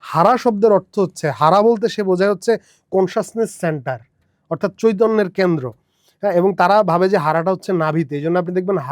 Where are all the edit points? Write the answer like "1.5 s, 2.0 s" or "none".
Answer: none